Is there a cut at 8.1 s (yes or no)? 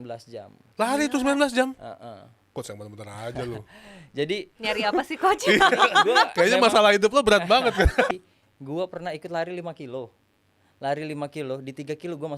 yes